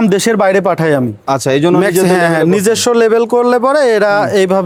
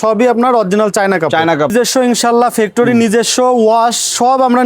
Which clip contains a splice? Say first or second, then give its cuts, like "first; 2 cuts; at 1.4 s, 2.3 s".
second; 1 cut; at 1.7 s